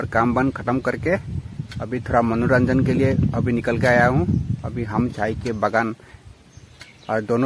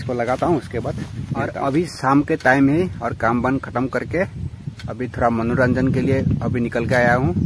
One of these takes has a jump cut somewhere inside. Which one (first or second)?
second